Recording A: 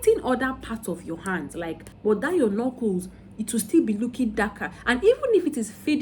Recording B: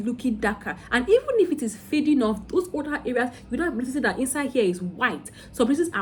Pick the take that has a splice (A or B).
A